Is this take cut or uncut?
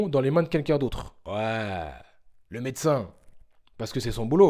cut